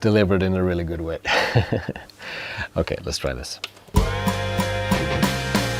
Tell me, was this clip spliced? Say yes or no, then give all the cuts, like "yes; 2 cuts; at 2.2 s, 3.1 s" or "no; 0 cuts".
yes; 1 cut; at 3.9 s